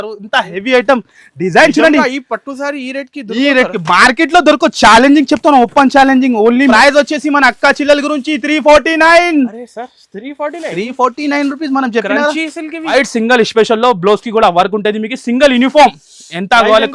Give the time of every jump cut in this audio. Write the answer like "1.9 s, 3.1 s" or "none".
6.7 s, 12.9 s